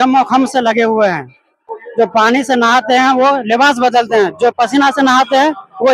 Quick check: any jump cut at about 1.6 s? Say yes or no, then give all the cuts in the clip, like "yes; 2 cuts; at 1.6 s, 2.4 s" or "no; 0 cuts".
yes; 1 cut; at 1.6 s